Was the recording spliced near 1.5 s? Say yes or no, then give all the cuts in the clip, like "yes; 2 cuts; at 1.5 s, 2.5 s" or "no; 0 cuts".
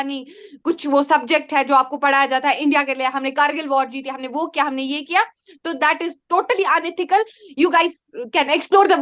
no; 0 cuts